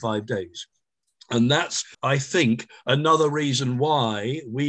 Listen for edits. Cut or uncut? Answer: cut